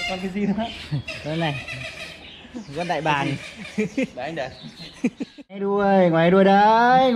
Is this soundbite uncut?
no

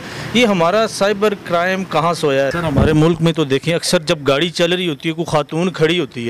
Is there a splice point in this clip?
yes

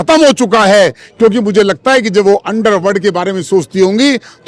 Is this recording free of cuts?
yes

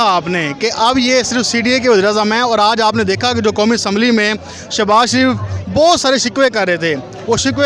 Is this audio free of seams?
yes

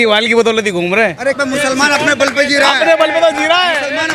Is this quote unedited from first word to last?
no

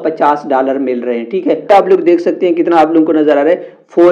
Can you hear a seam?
no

